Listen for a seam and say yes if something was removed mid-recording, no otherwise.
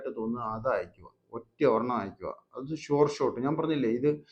no